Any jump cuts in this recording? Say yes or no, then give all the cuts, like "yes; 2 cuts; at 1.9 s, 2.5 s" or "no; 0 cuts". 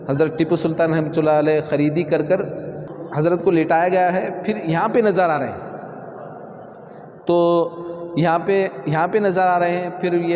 yes; 1 cut; at 2.9 s